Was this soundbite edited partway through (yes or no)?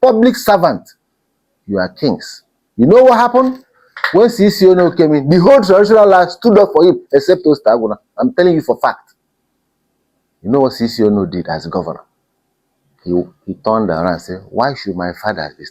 no